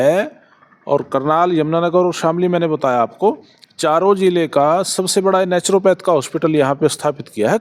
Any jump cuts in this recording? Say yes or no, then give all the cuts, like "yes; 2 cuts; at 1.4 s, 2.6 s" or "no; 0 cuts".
no; 0 cuts